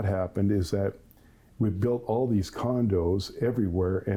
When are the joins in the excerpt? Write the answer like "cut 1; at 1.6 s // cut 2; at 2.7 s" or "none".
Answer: none